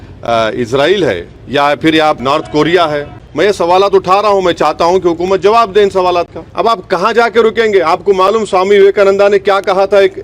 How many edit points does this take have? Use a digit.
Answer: 4